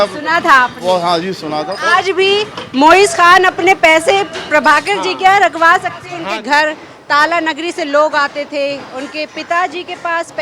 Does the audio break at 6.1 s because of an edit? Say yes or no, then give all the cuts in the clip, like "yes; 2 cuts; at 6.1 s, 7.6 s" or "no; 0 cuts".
yes; 2 cuts; at 1.7 s, 6.1 s